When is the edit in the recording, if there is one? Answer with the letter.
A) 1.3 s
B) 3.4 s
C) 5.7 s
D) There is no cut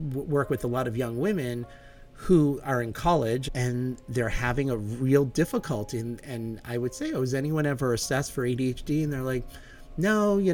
B